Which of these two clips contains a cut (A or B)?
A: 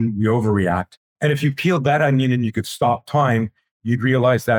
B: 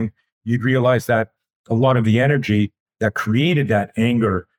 A